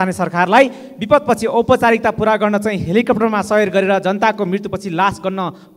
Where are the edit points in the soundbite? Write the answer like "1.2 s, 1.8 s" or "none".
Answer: none